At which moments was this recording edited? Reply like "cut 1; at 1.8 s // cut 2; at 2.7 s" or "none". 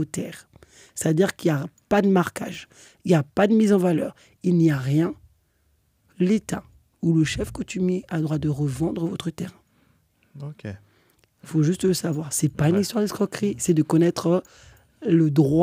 none